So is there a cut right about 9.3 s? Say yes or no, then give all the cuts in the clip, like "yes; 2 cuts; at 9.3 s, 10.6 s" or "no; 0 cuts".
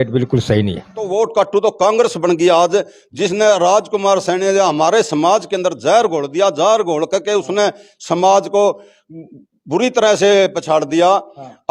no; 1 cut; at 1.0 s